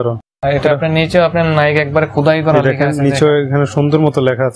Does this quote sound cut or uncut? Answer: uncut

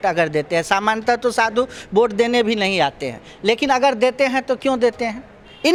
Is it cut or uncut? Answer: uncut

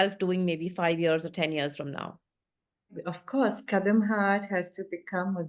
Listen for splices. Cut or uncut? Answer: cut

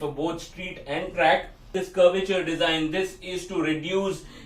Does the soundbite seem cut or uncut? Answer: cut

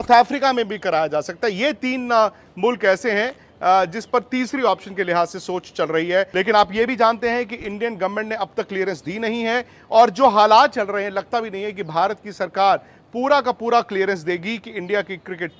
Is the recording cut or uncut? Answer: uncut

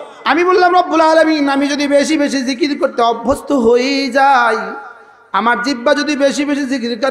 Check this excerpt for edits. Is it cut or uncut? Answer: uncut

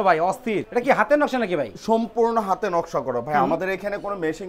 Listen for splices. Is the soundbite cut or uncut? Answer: uncut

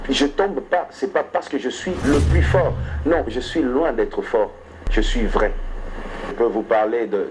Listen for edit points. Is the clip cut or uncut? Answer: uncut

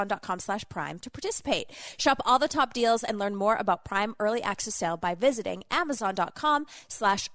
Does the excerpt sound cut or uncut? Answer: uncut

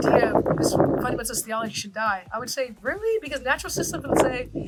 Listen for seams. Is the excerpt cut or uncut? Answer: uncut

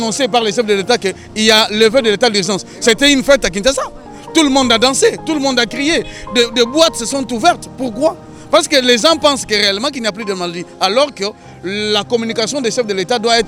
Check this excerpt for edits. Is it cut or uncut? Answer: uncut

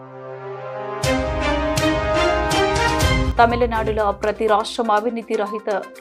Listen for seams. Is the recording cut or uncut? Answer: uncut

